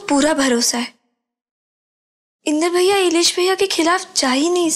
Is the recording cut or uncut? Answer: uncut